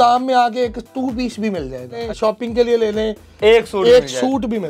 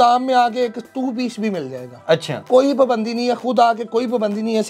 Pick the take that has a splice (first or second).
first